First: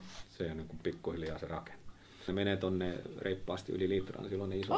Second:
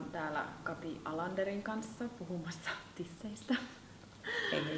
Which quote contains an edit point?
first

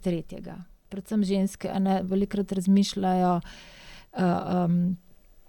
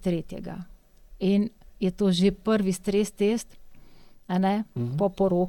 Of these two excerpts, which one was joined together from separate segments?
first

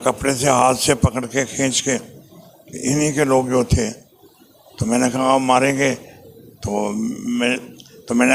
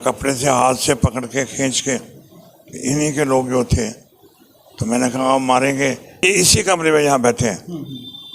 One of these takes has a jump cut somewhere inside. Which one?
second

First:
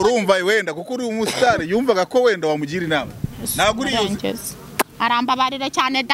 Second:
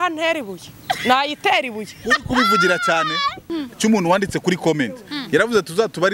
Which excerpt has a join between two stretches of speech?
second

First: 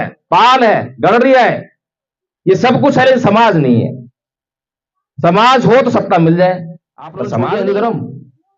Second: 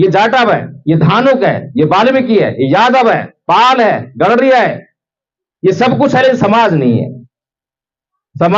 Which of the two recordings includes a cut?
first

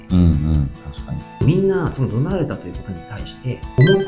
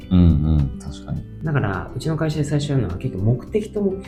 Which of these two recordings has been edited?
first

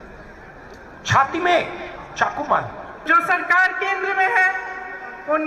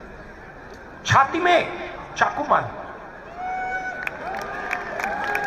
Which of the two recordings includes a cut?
first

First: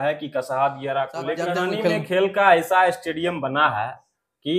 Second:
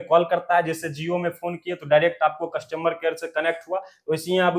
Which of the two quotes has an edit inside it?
first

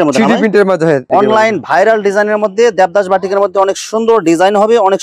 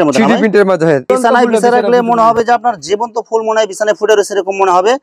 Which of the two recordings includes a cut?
first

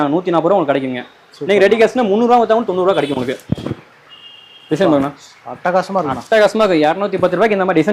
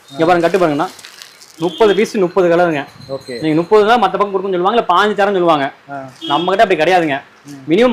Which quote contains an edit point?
first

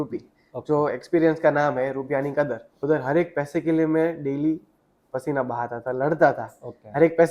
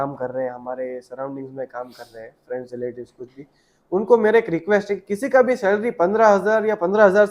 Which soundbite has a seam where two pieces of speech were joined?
first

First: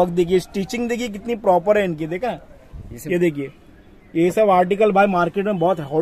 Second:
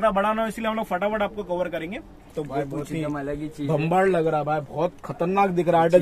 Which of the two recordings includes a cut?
second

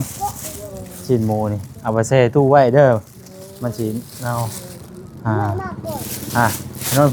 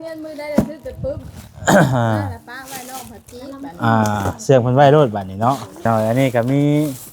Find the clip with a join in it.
second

